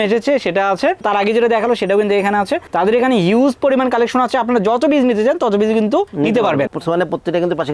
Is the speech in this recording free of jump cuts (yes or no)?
no